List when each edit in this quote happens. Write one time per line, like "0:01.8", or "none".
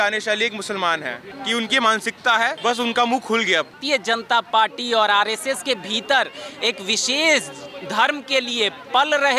0:01.3
0:02.6
0:03.8